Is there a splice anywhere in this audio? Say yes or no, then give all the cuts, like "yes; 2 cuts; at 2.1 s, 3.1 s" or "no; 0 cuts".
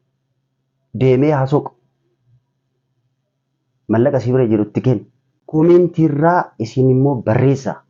no; 0 cuts